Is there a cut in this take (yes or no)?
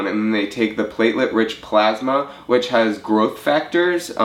no